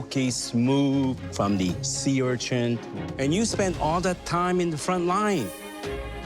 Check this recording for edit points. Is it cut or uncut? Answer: cut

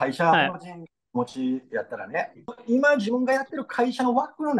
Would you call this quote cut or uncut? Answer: cut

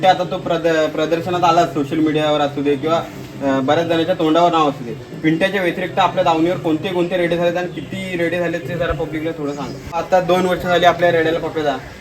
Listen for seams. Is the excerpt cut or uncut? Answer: cut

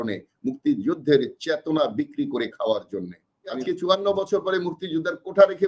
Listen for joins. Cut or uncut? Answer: cut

